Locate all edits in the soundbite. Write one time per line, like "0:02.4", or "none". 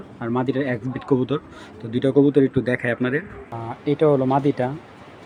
none